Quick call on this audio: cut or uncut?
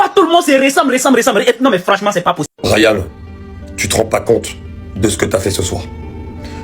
cut